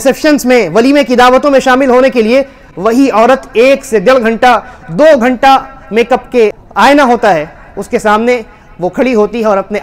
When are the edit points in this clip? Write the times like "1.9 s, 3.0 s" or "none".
6.6 s